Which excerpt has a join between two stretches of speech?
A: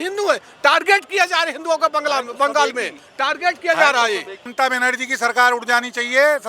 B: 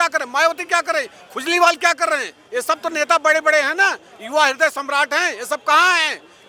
A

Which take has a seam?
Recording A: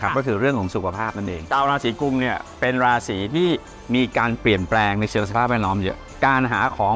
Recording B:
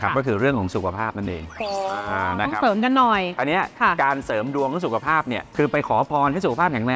A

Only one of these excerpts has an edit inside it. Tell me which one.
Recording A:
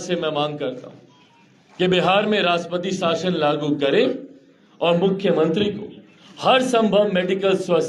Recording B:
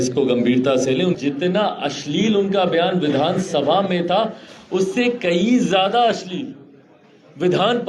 B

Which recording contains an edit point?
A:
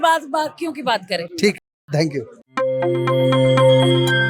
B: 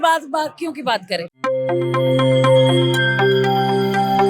B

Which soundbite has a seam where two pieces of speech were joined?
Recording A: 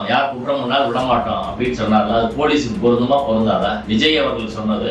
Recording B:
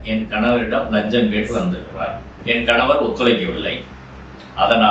B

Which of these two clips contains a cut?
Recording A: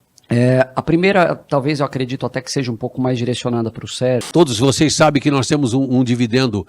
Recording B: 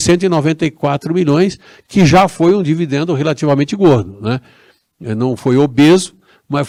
A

